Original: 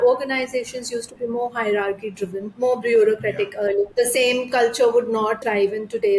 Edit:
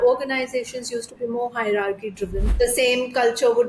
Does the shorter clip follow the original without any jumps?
no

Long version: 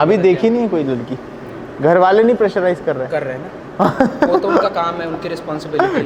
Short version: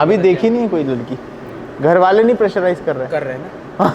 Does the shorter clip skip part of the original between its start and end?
no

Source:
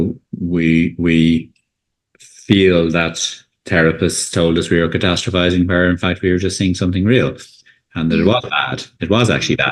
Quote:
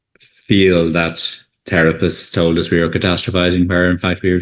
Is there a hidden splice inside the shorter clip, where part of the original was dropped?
no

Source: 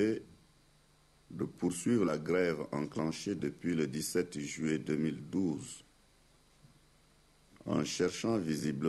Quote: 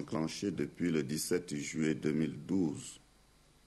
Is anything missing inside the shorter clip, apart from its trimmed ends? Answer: no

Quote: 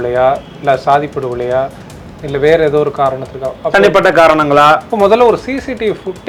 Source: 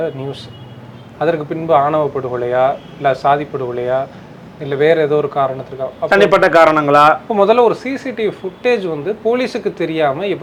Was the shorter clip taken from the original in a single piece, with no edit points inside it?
yes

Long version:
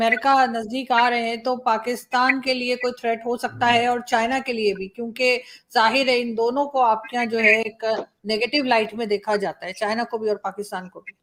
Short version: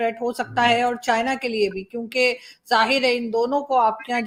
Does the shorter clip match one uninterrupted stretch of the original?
yes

